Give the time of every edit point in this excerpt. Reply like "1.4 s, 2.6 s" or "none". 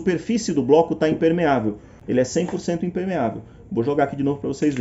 1.9 s